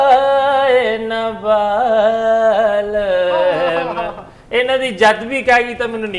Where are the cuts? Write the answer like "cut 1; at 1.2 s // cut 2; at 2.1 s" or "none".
none